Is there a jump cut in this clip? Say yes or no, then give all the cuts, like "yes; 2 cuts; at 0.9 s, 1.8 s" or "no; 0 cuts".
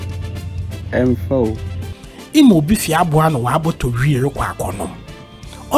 no; 0 cuts